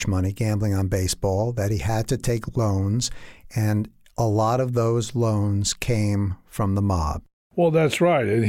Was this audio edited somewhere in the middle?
yes; 1 cut; at 7.3 s

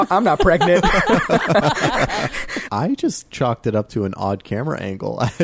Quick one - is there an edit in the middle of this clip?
yes; 1 cut; at 2.6 s

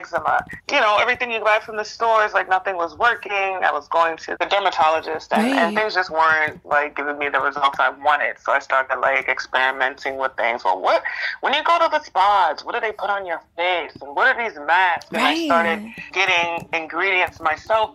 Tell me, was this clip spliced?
no; 0 cuts

